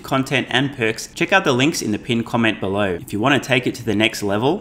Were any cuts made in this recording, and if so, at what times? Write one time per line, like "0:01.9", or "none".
0:01.1
0:03.0